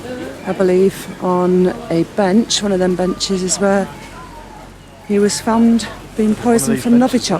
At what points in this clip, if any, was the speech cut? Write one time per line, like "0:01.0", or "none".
none